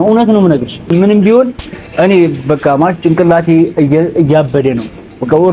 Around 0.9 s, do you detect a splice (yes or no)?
yes